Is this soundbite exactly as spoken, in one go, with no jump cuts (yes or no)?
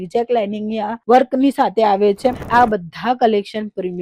no